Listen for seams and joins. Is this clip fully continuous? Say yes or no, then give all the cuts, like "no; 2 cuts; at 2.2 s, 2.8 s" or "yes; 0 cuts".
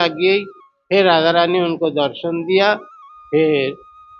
yes; 0 cuts